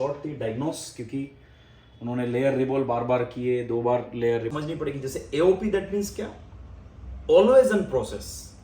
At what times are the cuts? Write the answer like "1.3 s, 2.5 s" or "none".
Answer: 4.5 s

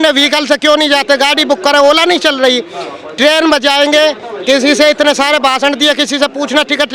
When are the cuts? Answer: none

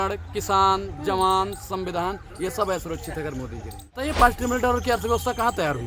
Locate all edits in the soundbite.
4.0 s

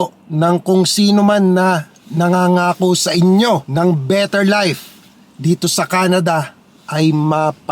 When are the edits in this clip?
3.7 s

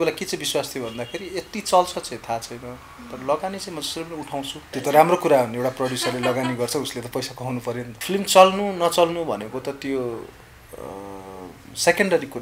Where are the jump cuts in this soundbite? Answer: 4.6 s, 8.0 s

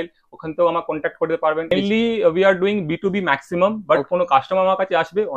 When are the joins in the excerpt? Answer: 1.7 s

